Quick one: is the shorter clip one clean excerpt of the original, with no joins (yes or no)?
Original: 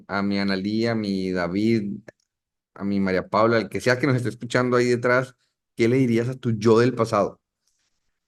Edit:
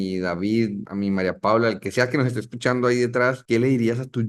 no